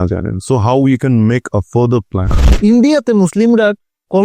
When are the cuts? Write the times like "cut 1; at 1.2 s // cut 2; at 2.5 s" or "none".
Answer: cut 1; at 2.4 s